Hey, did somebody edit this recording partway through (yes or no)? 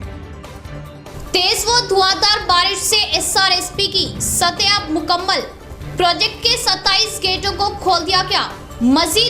yes